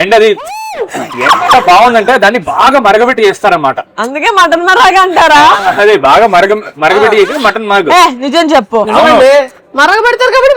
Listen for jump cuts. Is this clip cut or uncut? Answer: uncut